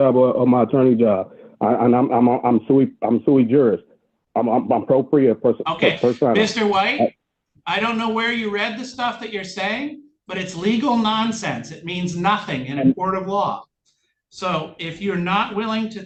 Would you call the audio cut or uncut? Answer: uncut